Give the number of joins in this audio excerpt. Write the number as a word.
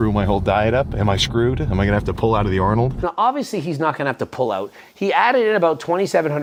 zero